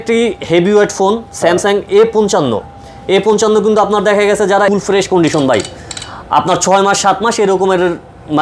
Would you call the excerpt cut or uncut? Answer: cut